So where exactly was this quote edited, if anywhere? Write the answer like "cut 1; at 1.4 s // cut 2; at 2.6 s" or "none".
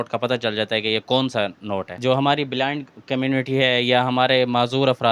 cut 1; at 1.9 s

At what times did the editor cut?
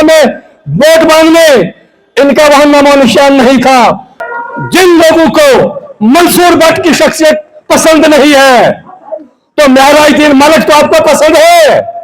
cut 1; at 4.2 s

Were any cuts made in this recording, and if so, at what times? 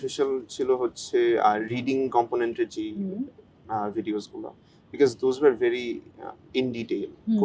none

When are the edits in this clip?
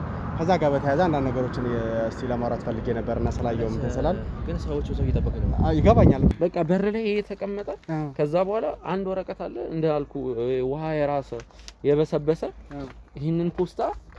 cut 1; at 6.3 s

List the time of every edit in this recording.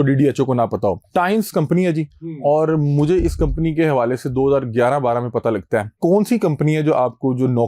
cut 1; at 1.0 s // cut 2; at 6.0 s

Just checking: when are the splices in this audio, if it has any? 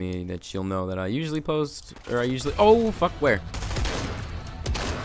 cut 1; at 3.5 s

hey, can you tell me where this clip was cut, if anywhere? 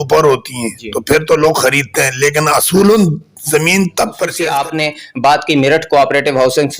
cut 1; at 4.3 s

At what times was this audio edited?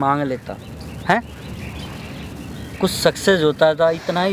none

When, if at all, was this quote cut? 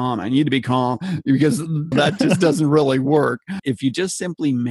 cut 1; at 1.9 s // cut 2; at 3.5 s

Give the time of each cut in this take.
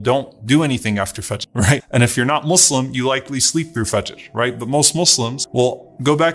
cut 1; at 1.6 s

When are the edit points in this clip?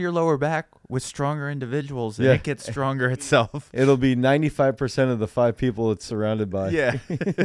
none

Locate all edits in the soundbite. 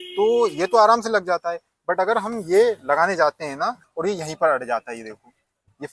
cut 1; at 3.8 s

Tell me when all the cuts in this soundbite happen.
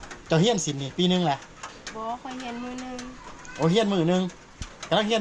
none

